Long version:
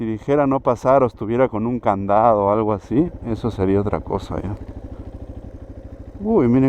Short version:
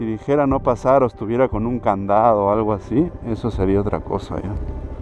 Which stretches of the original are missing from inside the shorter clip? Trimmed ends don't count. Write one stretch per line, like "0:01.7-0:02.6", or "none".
none